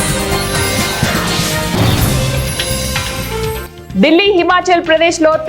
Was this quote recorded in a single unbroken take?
yes; 0 cuts

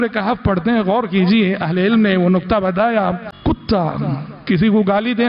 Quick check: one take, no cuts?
no; 1 cut; at 3.3 s

